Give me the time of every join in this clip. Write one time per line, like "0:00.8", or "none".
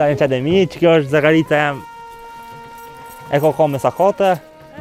none